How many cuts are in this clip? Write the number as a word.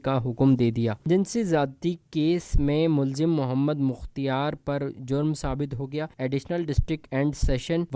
zero